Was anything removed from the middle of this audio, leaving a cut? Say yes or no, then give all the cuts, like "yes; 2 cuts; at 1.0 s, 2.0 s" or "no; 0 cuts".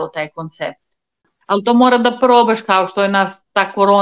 yes; 1 cut; at 1.3 s